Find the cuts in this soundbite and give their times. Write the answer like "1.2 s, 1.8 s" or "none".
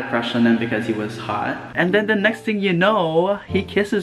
1.6 s